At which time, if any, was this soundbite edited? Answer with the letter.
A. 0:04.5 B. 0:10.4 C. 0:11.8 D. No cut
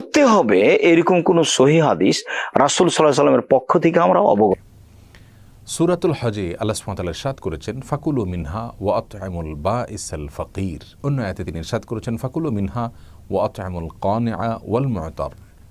A